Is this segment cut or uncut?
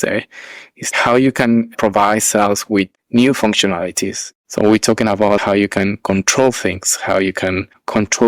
cut